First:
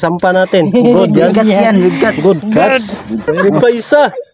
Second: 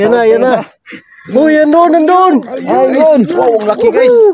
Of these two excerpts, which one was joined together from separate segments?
first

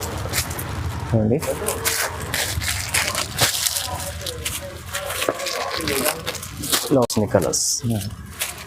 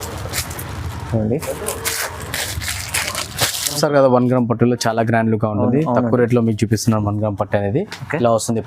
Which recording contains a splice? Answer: second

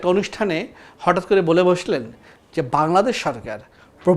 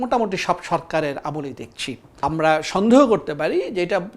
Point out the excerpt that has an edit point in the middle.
second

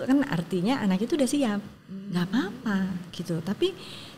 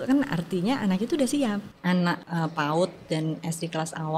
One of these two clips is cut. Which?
second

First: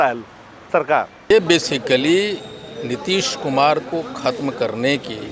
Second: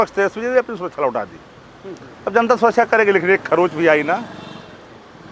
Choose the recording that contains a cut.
first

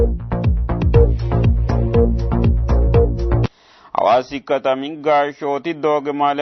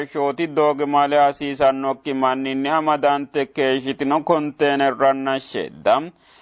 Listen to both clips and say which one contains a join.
first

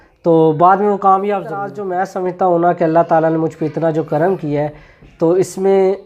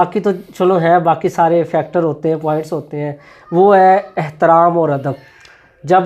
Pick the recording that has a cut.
first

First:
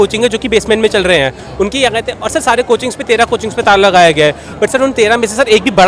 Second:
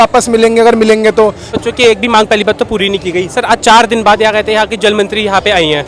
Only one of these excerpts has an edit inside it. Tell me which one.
second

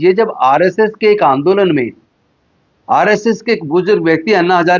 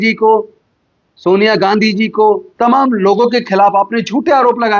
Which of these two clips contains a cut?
second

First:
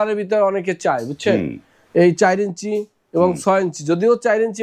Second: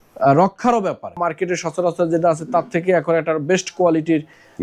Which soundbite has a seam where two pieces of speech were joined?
second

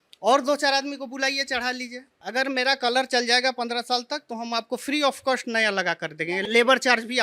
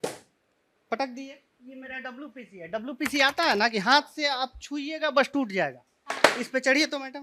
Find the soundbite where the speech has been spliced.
first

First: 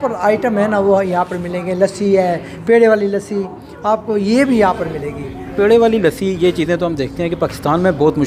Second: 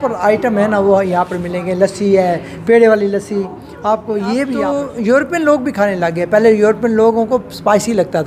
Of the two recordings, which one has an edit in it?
second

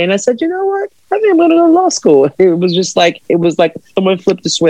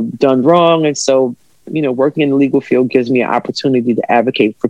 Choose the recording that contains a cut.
first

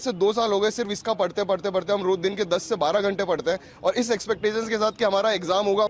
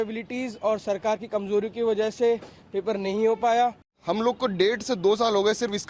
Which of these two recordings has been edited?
second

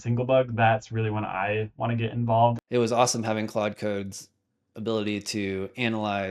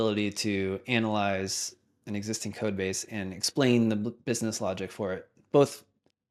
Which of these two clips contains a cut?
first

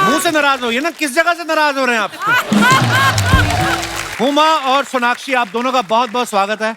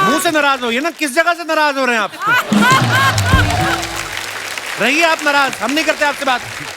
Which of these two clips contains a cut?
first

